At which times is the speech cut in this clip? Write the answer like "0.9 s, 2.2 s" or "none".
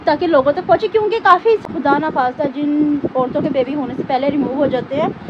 1.6 s